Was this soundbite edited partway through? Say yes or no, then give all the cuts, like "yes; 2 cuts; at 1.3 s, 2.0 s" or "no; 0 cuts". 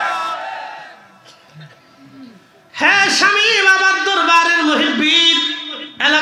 no; 0 cuts